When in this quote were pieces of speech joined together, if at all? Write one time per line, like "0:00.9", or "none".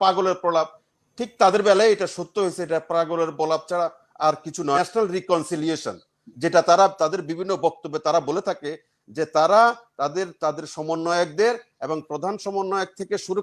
0:04.8